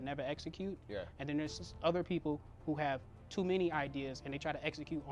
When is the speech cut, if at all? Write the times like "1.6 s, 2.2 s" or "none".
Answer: none